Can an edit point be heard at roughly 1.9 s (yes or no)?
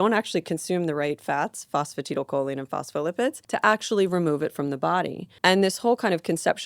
no